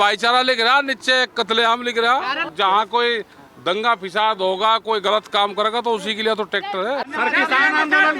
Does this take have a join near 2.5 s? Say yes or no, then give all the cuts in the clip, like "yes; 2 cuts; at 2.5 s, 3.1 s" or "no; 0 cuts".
yes; 2 cuts; at 2.5 s, 7.1 s